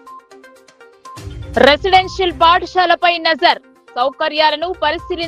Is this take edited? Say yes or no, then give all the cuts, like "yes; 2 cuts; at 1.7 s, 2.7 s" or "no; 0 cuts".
yes; 1 cut; at 1.5 s